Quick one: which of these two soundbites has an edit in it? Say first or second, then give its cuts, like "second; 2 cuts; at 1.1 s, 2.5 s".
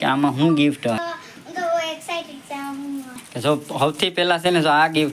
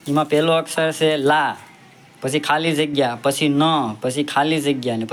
first; 2 cuts; at 1.0 s, 3.2 s